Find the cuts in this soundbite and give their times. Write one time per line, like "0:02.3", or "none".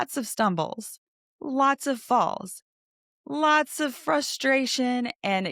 none

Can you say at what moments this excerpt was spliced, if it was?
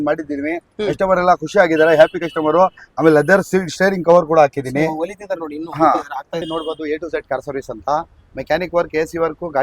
0:06.4

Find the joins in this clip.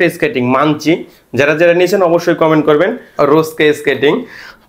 0:03.0

